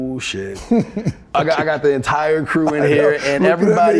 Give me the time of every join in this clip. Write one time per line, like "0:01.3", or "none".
0:01.3